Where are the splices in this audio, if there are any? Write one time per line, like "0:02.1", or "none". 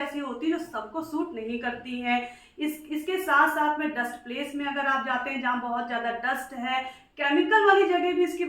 none